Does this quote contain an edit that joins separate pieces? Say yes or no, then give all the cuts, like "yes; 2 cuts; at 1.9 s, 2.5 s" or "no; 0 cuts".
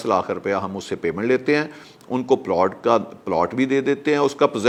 no; 0 cuts